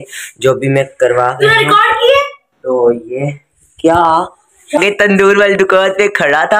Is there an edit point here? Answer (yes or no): yes